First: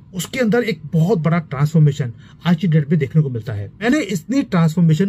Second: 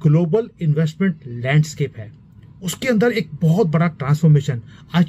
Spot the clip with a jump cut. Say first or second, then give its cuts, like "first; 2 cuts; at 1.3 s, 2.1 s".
first; 1 cut; at 3.8 s